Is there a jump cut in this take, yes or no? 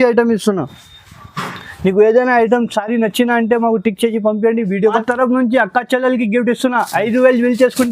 yes